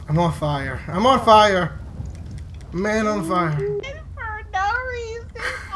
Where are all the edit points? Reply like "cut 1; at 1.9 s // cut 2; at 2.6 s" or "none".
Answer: cut 1; at 4.0 s